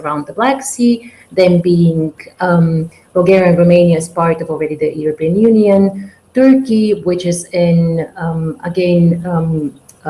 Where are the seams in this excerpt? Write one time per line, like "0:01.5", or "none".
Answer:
none

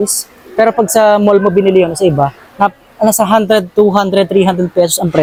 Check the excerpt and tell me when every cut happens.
none

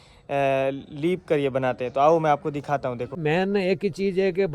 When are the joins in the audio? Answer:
0:03.1

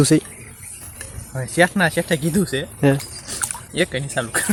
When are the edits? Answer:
none

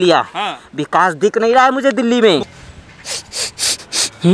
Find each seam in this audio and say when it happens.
0:02.6

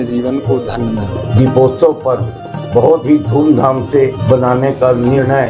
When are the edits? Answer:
0:01.2
0:04.2

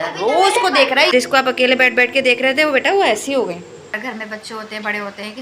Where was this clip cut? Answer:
0:01.1
0:03.9

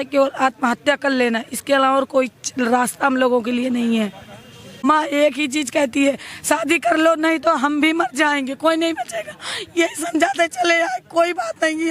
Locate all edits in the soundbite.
0:04.8

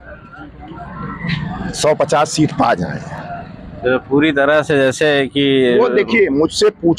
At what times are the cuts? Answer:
none

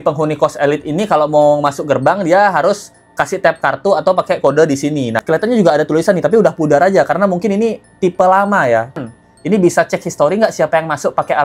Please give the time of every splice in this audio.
0:05.2
0:09.0

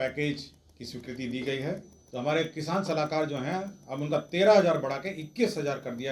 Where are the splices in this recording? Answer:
0:02.0

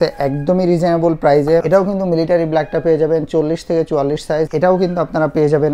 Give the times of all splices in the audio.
0:01.6
0:04.5

